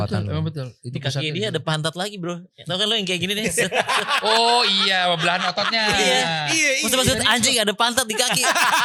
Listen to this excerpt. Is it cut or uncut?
uncut